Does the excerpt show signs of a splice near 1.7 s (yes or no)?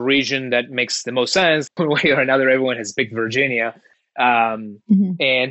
yes